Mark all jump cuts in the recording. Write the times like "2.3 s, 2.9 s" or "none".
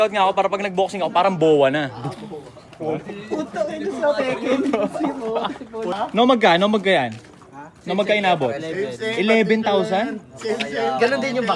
5.9 s